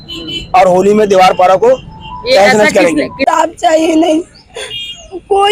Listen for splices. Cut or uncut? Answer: cut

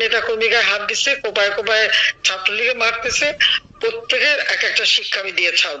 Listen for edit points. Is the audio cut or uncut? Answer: uncut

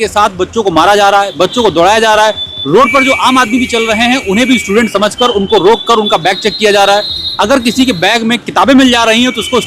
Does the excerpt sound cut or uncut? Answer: uncut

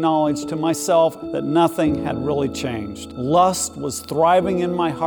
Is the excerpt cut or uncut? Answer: cut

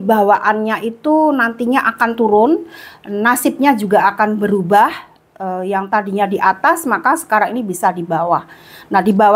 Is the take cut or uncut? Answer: uncut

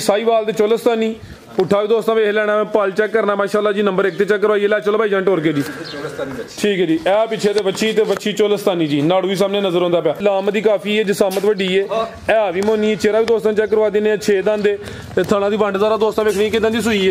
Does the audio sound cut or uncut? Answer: cut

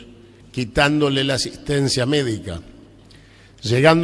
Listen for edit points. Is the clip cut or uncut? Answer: uncut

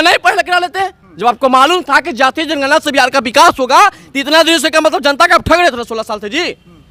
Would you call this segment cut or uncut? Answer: uncut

